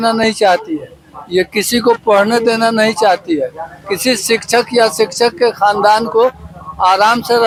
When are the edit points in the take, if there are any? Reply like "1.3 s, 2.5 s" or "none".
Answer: none

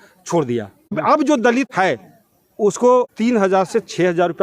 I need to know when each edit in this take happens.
1.0 s, 1.7 s, 3.1 s

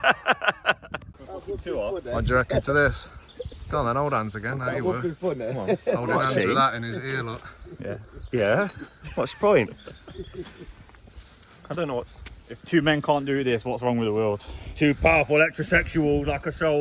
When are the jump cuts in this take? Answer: 0.9 s

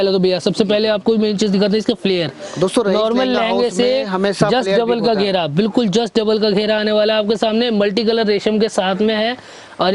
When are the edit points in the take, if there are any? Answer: none

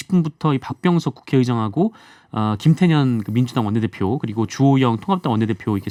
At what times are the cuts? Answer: none

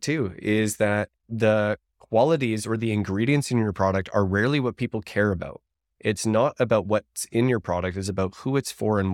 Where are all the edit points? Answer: 1.2 s

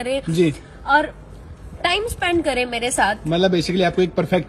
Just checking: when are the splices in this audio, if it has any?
none

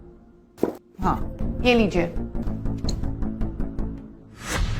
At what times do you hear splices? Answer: 1.3 s, 2.5 s

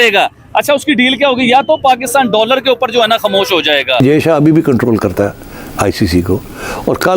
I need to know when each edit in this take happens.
4.0 s

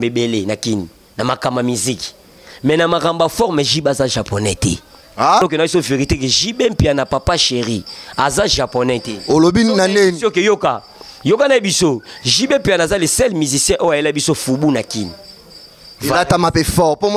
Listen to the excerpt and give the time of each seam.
5.4 s

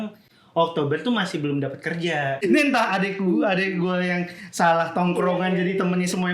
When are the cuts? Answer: 2.4 s

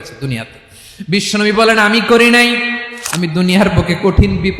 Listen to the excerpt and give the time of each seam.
2.9 s

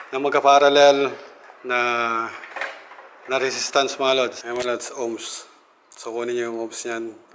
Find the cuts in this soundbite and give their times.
none

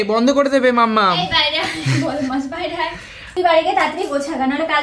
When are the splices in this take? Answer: 3.3 s

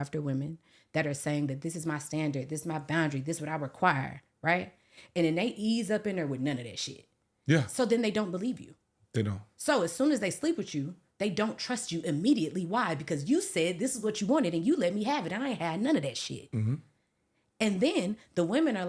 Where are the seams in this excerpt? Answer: none

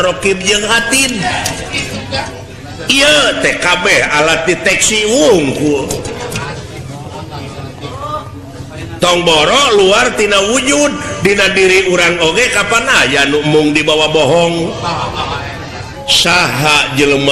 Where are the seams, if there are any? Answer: 16.0 s

